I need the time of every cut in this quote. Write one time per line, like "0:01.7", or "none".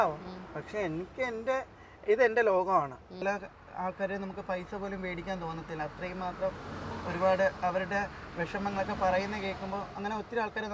0:03.2